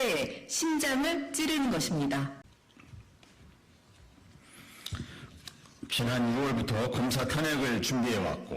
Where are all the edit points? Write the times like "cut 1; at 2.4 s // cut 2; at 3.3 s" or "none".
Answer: cut 1; at 2.4 s